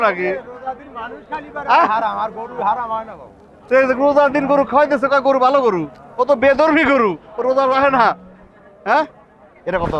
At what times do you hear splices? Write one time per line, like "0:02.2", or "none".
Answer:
none